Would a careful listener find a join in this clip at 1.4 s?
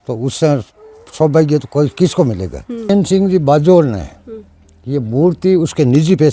no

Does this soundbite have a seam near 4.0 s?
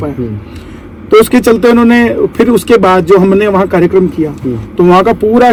no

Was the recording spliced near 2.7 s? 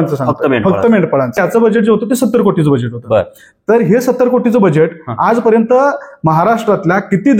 no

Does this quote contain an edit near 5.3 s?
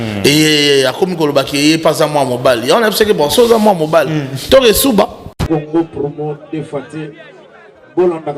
yes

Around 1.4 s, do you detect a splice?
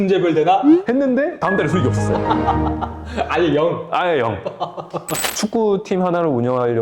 no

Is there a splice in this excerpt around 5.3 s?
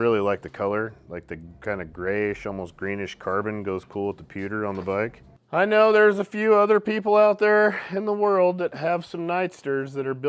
yes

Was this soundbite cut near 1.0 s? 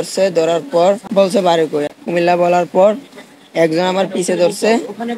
yes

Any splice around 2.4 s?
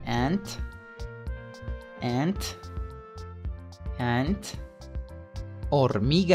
yes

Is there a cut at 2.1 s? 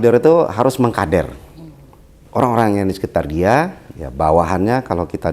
yes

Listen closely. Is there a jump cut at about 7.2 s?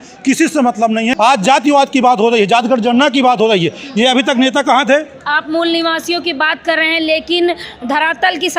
no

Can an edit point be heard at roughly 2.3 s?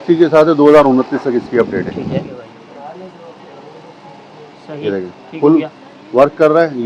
yes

